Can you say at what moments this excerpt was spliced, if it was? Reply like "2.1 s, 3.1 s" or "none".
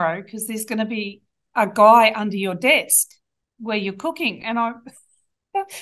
none